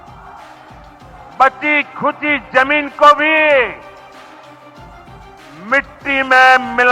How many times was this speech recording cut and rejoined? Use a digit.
0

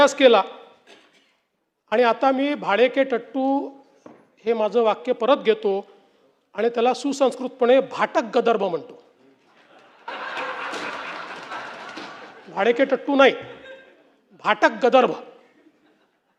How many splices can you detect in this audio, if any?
0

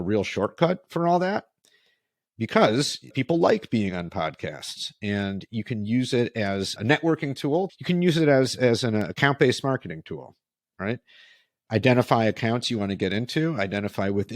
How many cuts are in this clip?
3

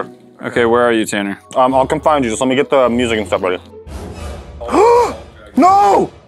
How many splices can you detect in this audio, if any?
1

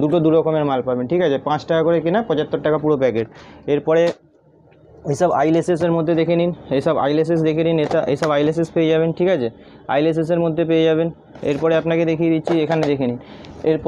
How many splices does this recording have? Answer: 0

